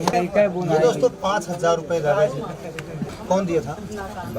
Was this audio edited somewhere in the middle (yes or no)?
no